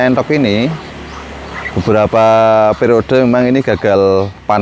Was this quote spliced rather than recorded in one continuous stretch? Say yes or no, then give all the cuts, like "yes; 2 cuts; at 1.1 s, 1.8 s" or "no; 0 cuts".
no; 0 cuts